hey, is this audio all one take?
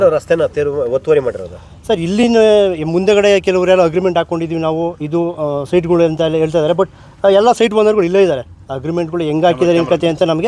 yes; 0 cuts

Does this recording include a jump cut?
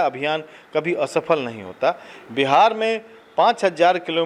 no; 0 cuts

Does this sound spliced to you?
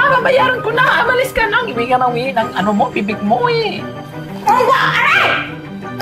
yes; 1 cut; at 4.0 s

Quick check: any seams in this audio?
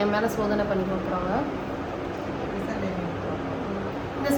no; 0 cuts

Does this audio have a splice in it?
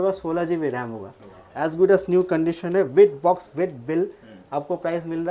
no; 0 cuts

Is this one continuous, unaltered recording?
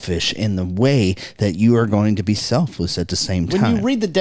yes; 0 cuts

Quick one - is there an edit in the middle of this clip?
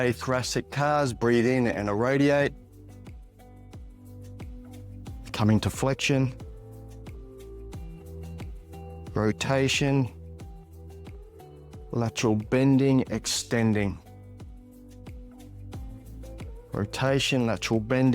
yes; 8 cuts; at 2.6 s, 5.3 s, 6.9 s, 9.1 s, 10.1 s, 11.9 s, 14.6 s, 16.7 s

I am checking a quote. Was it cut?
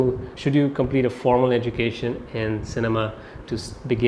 no; 0 cuts

